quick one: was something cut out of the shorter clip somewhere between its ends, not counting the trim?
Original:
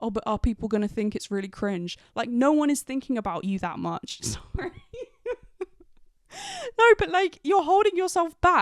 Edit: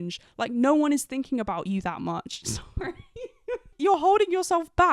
yes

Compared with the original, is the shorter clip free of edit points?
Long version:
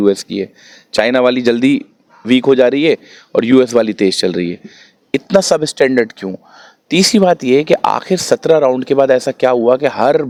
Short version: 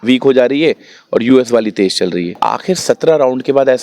no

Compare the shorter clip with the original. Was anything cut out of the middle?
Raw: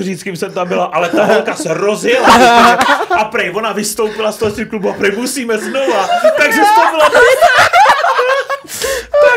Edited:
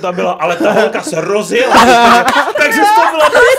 yes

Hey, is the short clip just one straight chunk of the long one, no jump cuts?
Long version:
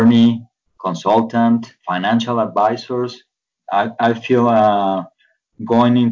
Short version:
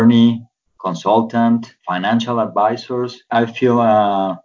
no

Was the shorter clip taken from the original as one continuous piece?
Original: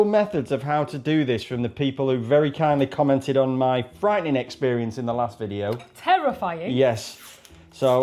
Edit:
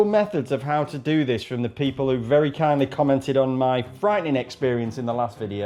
yes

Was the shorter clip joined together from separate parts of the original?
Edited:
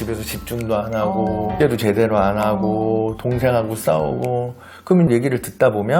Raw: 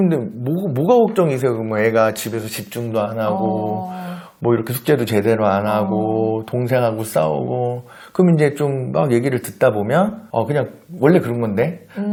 yes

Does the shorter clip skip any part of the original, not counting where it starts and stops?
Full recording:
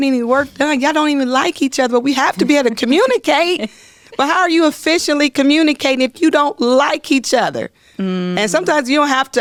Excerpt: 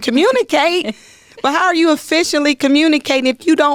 no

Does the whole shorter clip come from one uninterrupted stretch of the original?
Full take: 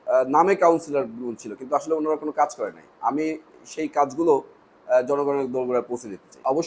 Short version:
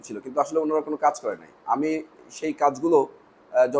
yes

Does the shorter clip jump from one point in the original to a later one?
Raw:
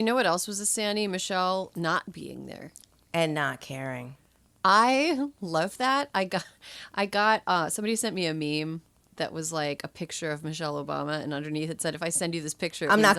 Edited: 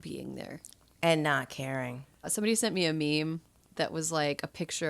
yes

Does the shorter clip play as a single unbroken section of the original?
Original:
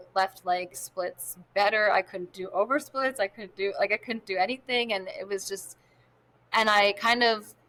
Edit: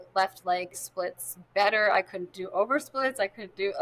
yes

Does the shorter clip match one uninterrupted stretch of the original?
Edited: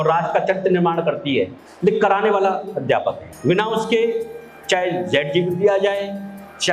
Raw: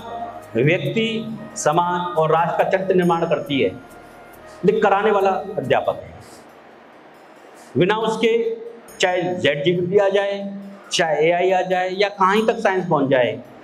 no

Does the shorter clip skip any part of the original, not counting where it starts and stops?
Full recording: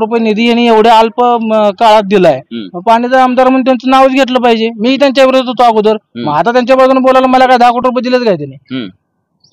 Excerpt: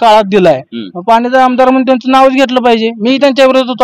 no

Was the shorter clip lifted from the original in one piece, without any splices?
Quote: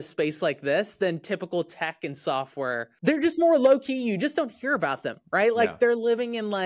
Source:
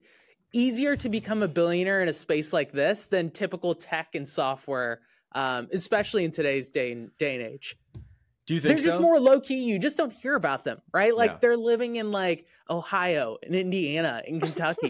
no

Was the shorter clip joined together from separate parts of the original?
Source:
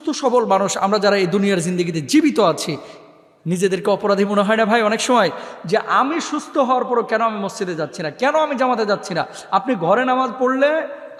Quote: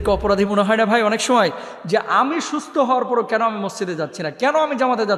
no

